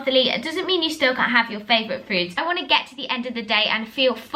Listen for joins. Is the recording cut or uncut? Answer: cut